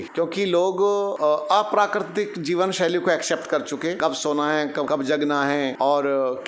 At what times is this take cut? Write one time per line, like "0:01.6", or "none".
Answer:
0:01.1
0:04.0
0:05.2

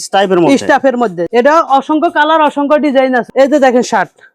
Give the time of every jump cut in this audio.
0:03.3

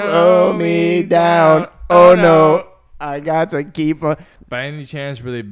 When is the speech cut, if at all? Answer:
0:04.3

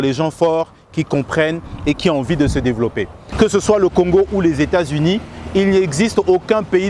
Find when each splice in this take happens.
0:03.2

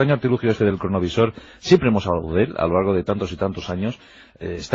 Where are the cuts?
0:03.2

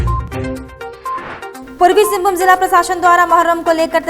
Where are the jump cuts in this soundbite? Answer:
0:01.6

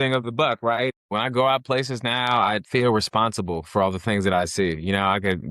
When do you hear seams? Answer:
0:01.0

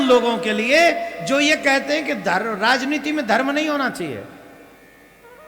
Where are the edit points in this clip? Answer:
none

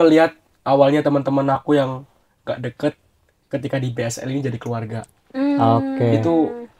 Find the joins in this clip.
none

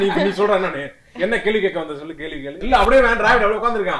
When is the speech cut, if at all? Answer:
0:02.6

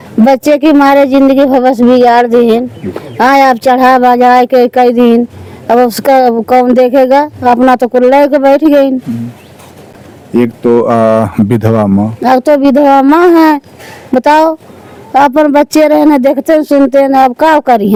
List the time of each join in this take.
none

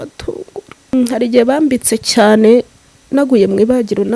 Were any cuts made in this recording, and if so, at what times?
0:00.9

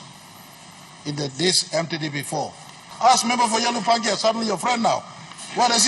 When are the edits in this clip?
0:02.8

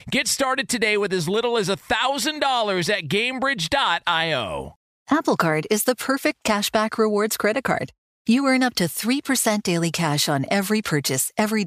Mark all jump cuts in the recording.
0:04.8

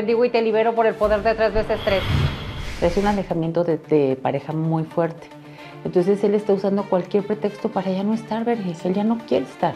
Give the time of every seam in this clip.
0:02.2

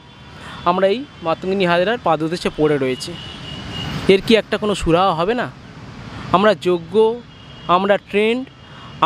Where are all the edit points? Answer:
none

